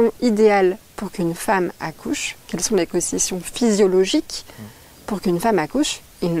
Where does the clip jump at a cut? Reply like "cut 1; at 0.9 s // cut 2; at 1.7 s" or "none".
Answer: none